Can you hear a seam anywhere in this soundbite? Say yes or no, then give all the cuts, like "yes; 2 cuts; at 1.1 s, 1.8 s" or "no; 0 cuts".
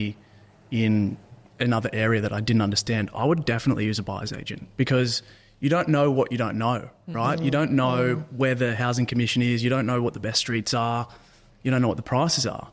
no; 0 cuts